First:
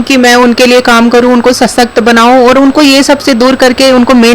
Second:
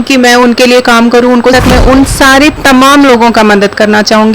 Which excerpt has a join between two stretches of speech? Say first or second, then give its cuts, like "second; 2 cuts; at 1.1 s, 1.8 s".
second; 1 cut; at 1.5 s